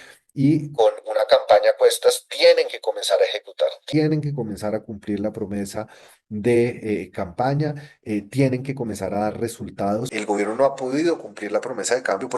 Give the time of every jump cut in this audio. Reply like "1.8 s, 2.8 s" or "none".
10.1 s